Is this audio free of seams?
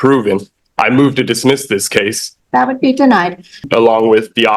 no; 2 cuts; at 2.2 s, 3.6 s

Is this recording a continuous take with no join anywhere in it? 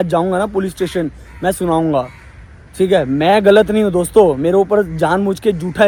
yes; 0 cuts

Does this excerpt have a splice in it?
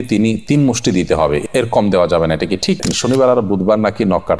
yes; 1 cut; at 2.9 s

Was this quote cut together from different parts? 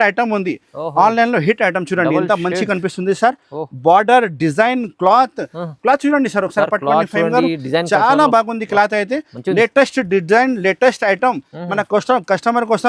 no; 0 cuts

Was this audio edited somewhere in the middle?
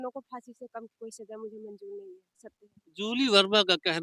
yes; 1 cut; at 2.5 s

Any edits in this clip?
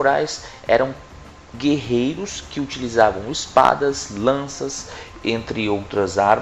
yes; 1 cut; at 4.0 s

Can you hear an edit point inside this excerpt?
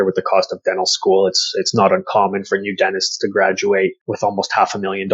yes; 1 cut; at 4.0 s

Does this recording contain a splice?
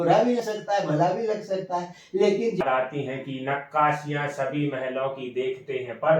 yes; 1 cut; at 2.6 s

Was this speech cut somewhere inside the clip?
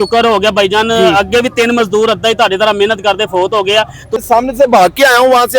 yes; 1 cut; at 4.2 s

